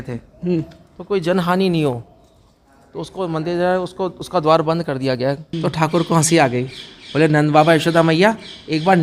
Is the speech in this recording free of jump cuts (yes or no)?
no